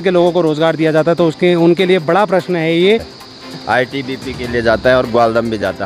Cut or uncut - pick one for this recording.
cut